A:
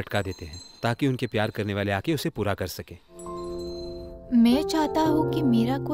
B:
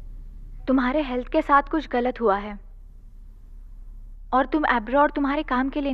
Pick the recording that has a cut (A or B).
A